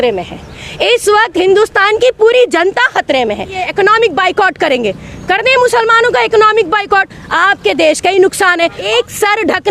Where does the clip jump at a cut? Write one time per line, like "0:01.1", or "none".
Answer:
0:03.6
0:08.8